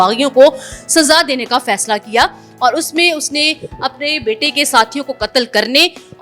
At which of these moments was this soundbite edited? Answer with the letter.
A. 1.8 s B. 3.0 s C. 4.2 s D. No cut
D